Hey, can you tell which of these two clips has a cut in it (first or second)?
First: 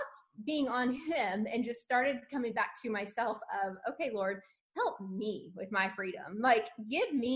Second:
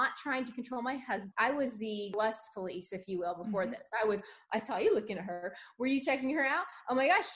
second